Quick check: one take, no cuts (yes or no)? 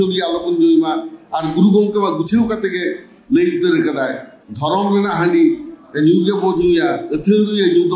yes